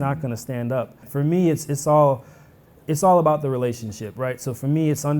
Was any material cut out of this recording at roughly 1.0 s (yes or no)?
yes